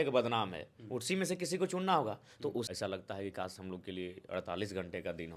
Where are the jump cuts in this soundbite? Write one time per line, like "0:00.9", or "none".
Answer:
0:02.7